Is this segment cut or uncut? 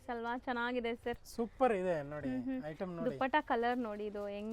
uncut